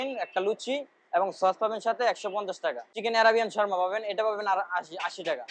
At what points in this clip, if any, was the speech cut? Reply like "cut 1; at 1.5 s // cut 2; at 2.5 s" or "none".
cut 1; at 2.9 s